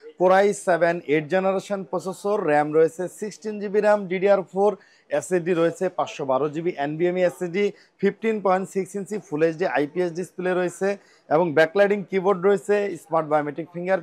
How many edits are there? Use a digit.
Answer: 0